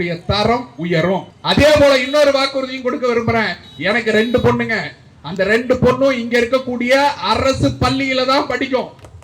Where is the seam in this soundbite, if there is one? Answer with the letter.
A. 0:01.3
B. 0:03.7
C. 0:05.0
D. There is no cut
A